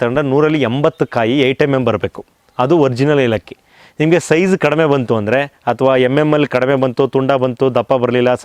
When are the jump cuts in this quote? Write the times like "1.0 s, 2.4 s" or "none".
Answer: none